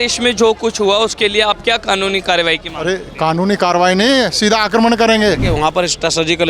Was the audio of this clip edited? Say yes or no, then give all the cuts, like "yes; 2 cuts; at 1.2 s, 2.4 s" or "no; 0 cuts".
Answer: yes; 1 cut; at 5.4 s